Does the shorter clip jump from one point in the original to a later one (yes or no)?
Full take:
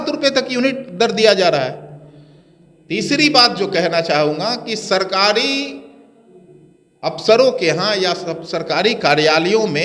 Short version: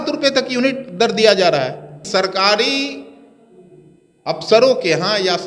yes